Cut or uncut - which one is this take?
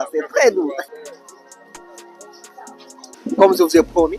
cut